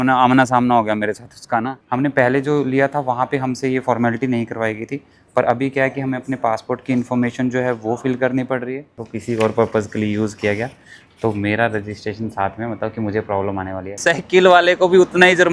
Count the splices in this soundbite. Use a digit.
3